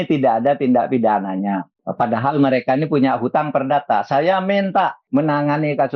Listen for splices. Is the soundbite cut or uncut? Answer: cut